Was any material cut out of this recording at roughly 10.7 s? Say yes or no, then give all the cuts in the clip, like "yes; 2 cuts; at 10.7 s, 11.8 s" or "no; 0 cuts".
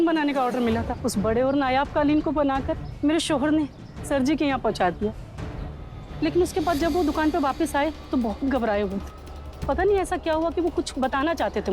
no; 1 cut; at 0.9 s